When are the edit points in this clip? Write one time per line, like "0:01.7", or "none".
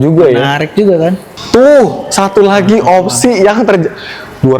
0:01.3